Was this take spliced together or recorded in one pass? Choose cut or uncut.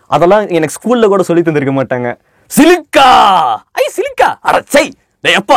cut